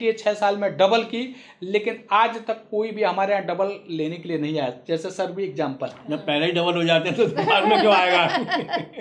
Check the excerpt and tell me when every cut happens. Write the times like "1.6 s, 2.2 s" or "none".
none